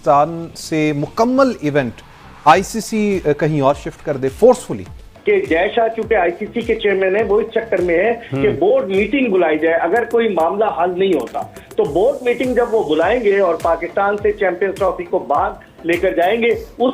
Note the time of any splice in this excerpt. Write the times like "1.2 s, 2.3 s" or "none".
5.1 s